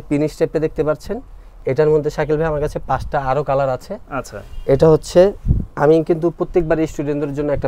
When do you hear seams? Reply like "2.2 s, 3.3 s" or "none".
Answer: none